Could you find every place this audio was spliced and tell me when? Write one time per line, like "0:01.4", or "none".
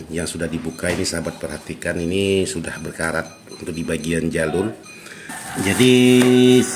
0:05.4